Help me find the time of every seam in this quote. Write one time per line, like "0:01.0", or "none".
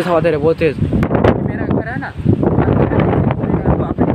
0:01.1